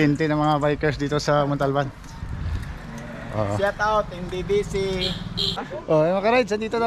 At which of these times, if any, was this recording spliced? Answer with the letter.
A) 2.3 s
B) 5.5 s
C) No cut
B